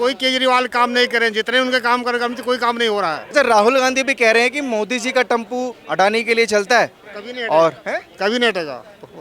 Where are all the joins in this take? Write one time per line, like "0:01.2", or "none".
0:03.2